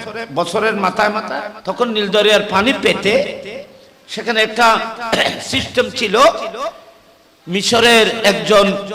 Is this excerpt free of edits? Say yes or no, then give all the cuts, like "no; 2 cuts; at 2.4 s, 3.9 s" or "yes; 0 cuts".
no; 1 cut; at 1.5 s